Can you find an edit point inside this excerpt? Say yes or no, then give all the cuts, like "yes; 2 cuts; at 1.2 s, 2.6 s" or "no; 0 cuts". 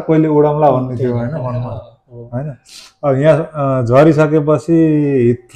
no; 0 cuts